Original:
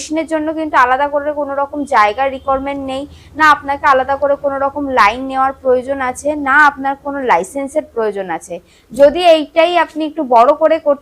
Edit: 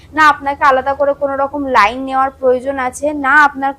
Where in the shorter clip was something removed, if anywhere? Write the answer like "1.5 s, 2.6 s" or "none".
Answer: none